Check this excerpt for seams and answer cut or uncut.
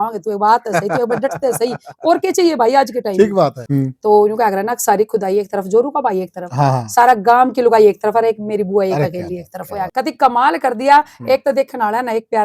cut